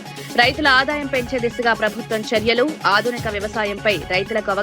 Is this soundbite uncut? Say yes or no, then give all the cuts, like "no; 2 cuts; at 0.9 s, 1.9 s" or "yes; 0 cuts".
yes; 0 cuts